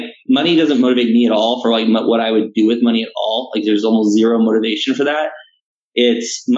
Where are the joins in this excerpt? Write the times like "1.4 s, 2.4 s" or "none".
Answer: none

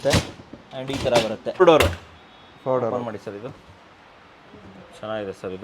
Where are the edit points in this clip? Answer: 1.6 s

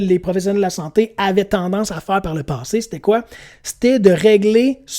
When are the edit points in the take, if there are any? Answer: none

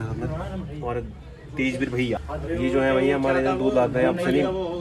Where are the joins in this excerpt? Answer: 2.3 s

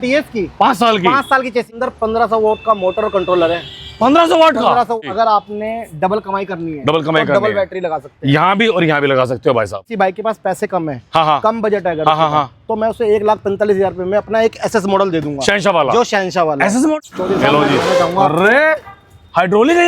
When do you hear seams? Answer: 1.7 s, 4.9 s, 9.8 s, 16.9 s

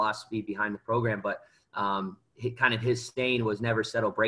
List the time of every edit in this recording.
none

